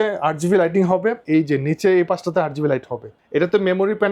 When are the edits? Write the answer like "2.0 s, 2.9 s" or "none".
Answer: 1.2 s, 3.2 s